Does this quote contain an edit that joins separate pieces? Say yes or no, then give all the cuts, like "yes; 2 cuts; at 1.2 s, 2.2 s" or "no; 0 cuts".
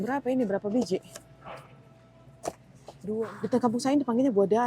yes; 1 cut; at 3.2 s